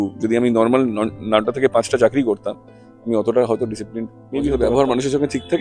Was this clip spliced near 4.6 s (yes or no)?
yes